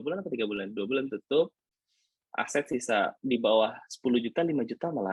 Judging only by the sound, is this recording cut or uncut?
uncut